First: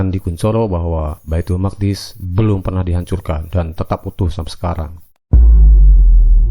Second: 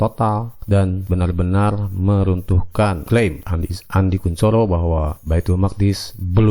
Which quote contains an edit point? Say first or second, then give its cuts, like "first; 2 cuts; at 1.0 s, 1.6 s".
first; 1 cut; at 5.1 s